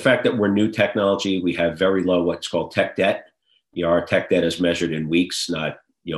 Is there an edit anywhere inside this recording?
no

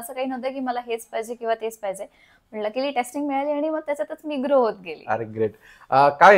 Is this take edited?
no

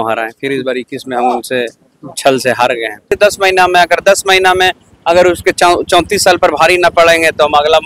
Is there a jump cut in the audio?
yes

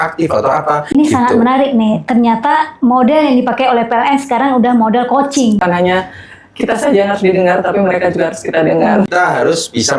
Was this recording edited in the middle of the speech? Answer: yes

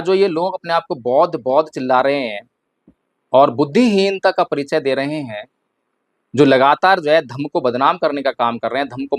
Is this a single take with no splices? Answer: yes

